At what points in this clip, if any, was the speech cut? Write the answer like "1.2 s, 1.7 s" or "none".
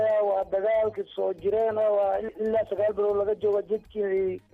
2.3 s